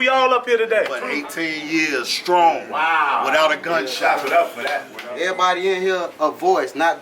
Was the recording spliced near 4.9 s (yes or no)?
yes